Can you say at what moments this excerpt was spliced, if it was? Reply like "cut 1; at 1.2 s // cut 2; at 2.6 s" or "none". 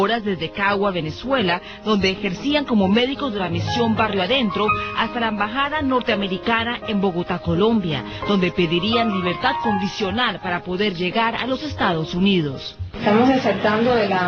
cut 1; at 6.7 s